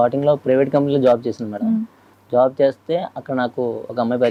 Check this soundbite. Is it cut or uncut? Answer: uncut